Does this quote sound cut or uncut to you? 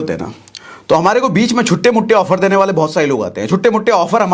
uncut